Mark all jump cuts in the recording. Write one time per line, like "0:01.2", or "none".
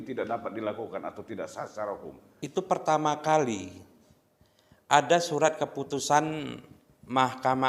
0:02.2